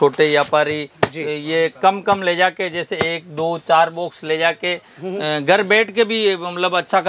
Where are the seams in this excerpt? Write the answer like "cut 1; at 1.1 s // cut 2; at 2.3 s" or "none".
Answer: none